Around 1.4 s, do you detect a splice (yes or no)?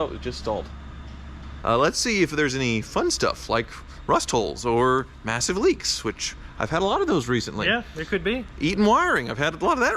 yes